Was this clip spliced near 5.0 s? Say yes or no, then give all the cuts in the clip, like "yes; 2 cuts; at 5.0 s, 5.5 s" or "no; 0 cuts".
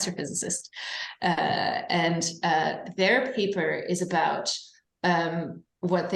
no; 0 cuts